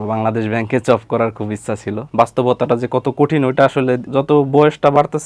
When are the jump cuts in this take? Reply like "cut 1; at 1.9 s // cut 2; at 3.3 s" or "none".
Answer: cut 1; at 2.1 s // cut 2; at 4.0 s